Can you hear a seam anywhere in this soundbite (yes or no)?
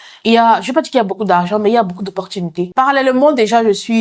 yes